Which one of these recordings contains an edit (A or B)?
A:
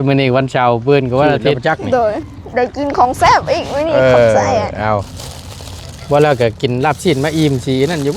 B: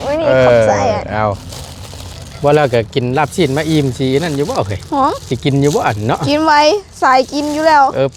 A